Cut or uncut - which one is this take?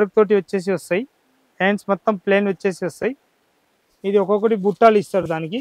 uncut